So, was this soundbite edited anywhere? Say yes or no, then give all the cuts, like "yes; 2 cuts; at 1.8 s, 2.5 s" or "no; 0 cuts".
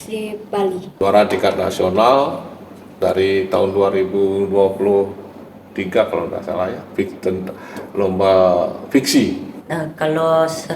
yes; 2 cuts; at 1.0 s, 9.6 s